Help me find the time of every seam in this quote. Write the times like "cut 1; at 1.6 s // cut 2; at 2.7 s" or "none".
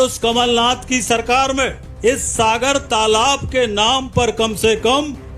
cut 1; at 1.8 s